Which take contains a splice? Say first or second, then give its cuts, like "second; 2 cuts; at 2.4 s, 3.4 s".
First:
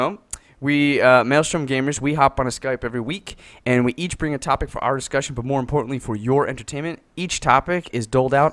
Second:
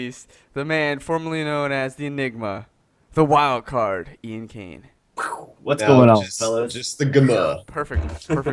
first; 1 cut; at 3.5 s